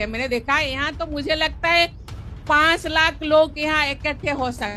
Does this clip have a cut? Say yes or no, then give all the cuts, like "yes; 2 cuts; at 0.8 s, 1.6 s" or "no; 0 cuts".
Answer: no; 0 cuts